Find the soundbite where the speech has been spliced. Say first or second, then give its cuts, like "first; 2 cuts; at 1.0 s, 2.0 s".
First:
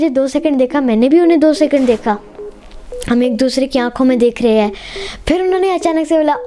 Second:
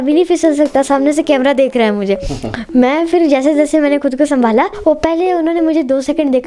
second; 1 cut; at 4.7 s